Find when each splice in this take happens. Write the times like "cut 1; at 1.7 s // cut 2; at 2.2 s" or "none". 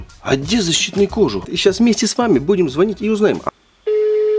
cut 1; at 1.5 s // cut 2; at 3.4 s